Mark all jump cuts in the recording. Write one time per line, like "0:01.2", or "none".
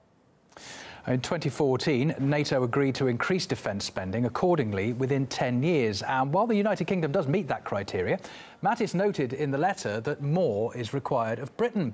none